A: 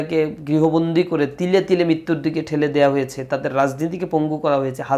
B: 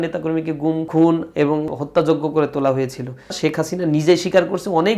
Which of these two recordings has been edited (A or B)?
B